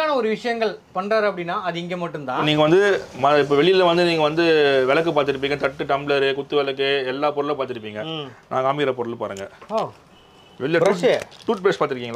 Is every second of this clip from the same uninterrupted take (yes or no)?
no